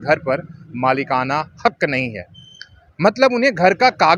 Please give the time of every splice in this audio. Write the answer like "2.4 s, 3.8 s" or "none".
none